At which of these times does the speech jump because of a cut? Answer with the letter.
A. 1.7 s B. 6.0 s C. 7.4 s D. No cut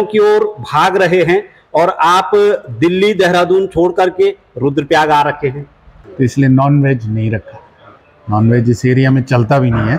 B